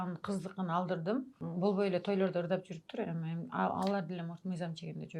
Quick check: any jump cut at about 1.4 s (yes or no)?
yes